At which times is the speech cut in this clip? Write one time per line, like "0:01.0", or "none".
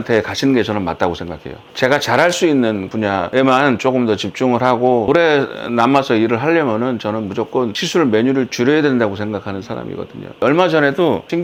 none